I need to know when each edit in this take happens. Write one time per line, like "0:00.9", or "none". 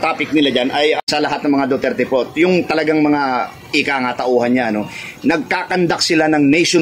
0:01.0